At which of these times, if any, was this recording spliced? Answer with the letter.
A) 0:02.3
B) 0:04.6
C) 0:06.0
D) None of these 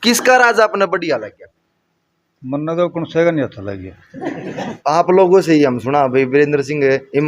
B